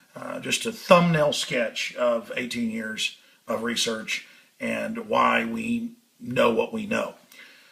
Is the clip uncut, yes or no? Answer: yes